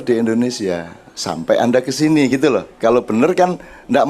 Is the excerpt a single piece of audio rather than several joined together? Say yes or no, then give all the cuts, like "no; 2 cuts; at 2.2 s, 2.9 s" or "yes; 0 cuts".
yes; 0 cuts